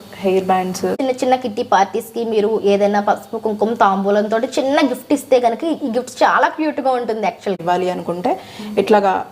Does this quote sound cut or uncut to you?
cut